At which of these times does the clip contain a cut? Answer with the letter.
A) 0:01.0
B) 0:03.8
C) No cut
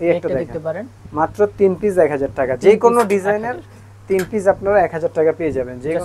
A